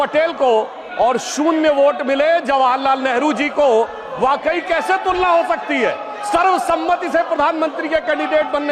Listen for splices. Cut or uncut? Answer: uncut